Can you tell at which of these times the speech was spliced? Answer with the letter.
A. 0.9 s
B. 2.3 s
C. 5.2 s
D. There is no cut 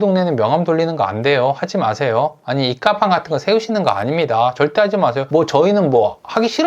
C